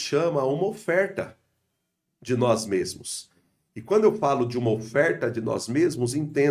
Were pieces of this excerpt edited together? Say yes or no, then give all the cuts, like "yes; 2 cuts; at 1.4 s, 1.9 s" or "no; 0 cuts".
no; 0 cuts